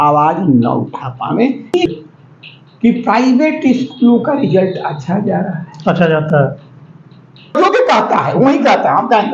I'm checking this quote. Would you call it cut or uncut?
cut